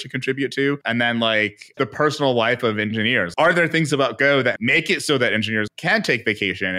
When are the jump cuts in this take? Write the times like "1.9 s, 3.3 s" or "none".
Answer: 0.8 s, 1.7 s, 3.3 s, 4.6 s, 5.7 s